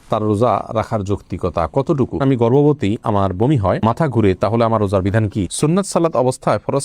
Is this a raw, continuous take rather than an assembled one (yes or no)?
no